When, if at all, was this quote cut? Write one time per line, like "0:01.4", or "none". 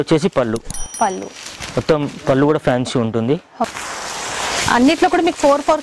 0:03.7

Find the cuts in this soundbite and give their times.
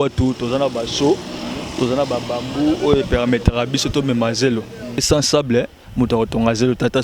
0:05.0

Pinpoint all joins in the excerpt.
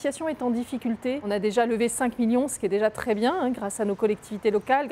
0:01.2

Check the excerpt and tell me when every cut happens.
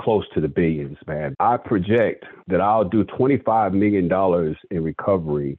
0:01.3

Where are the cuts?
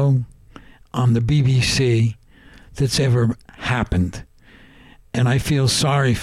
none

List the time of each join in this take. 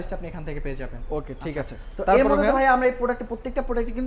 none

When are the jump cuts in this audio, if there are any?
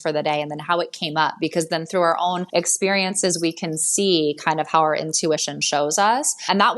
0:02.4

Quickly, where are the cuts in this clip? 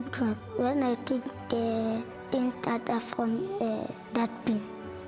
0:01.6

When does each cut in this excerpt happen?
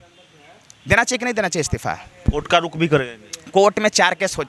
none

